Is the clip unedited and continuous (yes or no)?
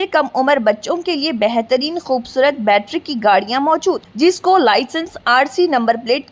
yes